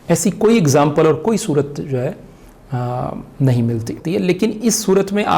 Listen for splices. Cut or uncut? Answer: cut